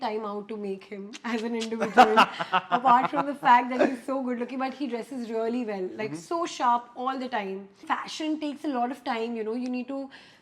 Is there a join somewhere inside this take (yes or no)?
yes